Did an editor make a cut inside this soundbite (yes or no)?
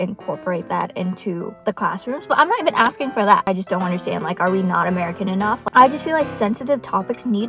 yes